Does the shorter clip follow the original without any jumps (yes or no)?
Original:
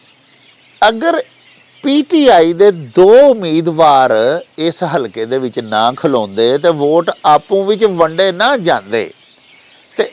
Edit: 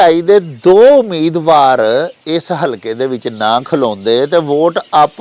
yes